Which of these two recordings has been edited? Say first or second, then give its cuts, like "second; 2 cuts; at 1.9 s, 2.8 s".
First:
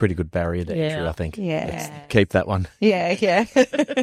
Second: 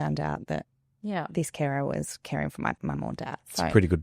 second; 1 cut; at 2.8 s